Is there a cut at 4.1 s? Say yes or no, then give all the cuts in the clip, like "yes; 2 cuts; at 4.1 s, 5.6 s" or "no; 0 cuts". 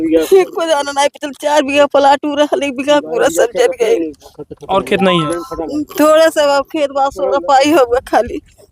no; 0 cuts